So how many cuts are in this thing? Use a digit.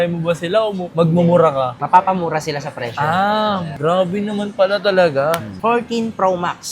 1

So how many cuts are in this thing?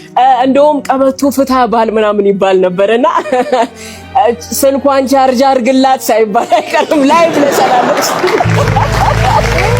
1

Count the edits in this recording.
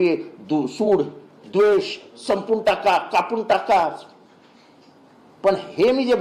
0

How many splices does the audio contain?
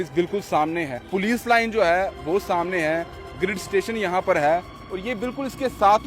1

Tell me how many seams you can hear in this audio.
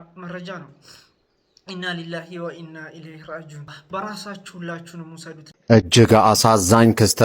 2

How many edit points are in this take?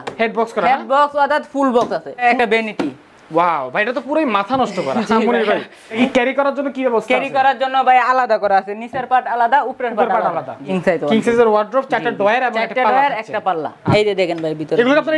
4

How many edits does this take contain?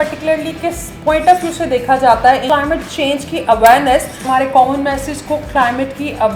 2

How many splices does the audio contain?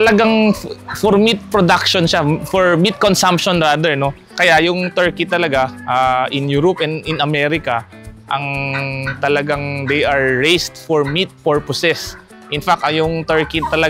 1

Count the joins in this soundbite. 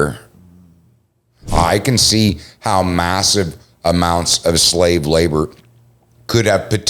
1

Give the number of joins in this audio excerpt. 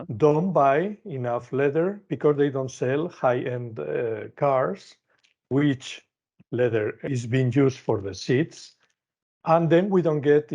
1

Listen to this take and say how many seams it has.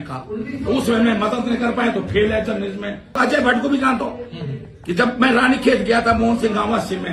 1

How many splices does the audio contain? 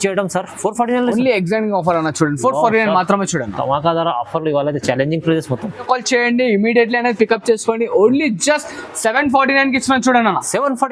1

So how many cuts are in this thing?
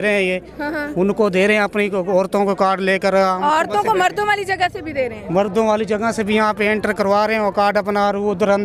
0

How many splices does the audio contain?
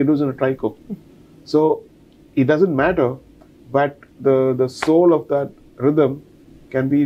0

